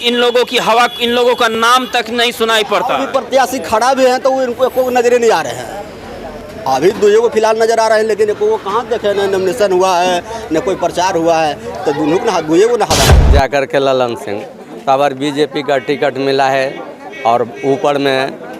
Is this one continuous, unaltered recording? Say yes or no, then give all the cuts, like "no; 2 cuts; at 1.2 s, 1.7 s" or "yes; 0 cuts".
no; 1 cut; at 13.2 s